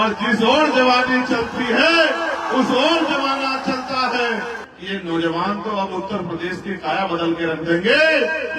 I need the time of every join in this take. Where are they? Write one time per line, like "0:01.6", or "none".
0:04.7

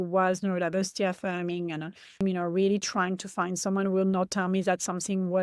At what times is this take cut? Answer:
0:02.2

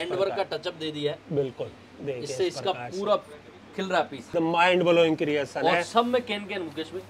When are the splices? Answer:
0:04.3

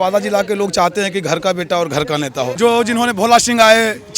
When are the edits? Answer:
0:02.5

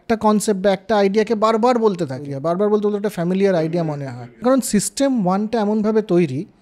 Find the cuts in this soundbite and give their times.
0:02.3
0:04.4

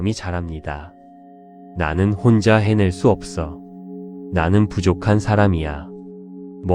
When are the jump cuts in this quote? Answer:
0:01.1

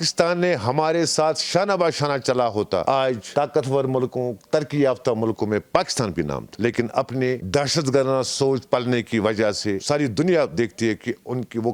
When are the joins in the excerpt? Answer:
none

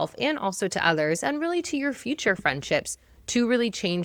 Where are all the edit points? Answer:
none

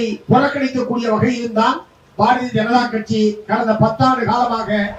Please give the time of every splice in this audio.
none

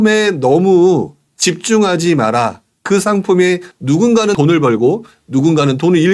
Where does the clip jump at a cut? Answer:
0:03.7

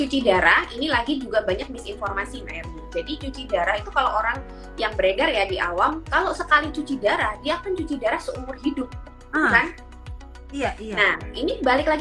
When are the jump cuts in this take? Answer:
none

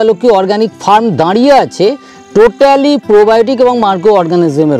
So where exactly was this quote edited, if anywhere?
none

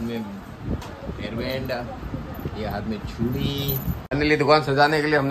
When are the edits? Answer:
0:04.0

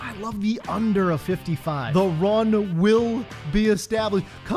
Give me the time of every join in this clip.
0:01.8

